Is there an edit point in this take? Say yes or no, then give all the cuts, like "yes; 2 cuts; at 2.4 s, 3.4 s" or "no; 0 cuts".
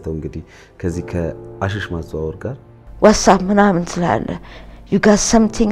yes; 1 cut; at 2.8 s